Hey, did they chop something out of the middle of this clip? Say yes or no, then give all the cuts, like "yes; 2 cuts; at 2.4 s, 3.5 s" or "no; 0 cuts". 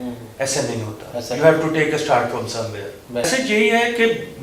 yes; 1 cut; at 3.2 s